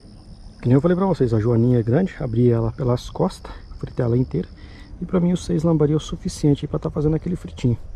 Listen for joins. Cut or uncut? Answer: uncut